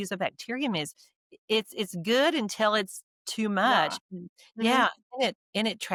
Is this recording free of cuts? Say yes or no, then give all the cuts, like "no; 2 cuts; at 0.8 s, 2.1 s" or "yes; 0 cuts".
yes; 0 cuts